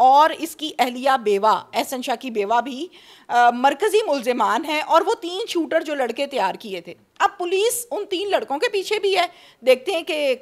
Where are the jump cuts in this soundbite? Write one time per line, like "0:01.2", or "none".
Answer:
none